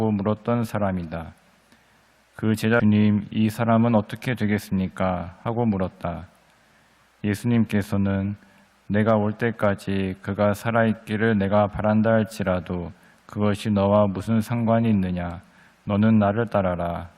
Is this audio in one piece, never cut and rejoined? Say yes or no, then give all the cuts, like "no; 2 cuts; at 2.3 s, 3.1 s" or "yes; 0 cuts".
no; 1 cut; at 2.8 s